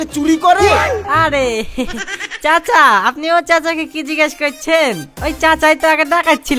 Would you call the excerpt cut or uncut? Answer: uncut